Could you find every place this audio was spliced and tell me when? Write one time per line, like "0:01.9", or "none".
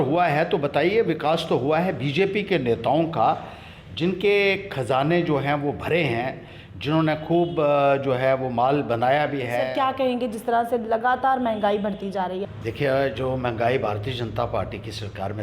0:09.7
0:12.4